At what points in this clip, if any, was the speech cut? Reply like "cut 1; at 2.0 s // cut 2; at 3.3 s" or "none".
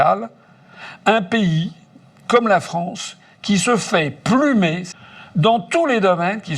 cut 1; at 4.9 s

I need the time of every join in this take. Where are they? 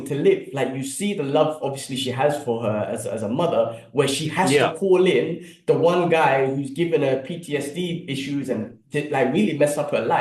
none

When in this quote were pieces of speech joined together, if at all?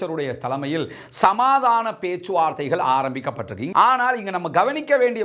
cut 1; at 3.6 s

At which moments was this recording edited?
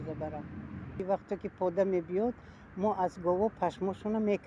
cut 1; at 1.0 s

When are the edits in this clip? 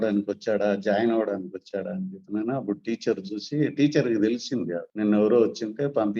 cut 1; at 4.8 s

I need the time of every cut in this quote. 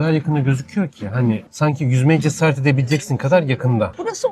none

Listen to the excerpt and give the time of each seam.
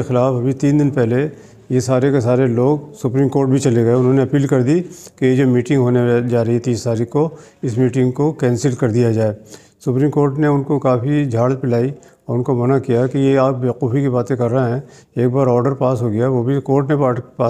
none

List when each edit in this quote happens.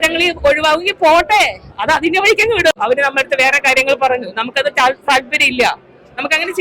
cut 1; at 2.7 s

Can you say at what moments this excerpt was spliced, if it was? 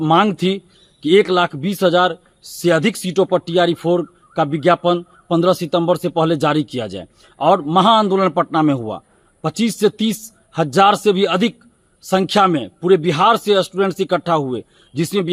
none

